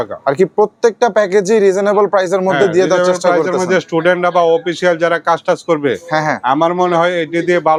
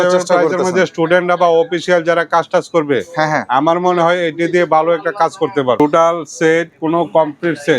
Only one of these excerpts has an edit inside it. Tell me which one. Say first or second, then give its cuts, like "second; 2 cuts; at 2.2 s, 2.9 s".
second; 1 cut; at 5.8 s